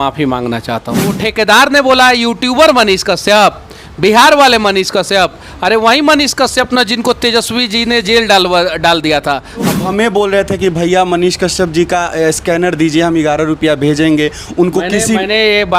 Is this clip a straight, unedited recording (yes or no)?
no